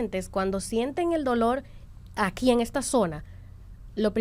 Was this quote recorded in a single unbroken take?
yes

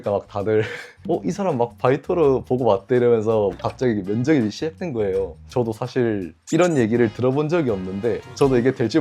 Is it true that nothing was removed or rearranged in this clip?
no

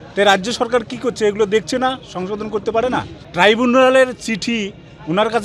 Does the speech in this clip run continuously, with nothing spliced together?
yes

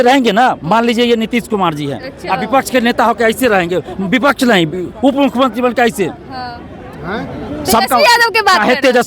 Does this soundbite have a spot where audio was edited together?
no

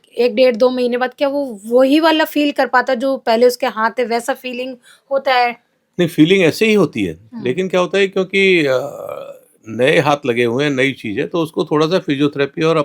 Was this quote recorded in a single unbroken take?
yes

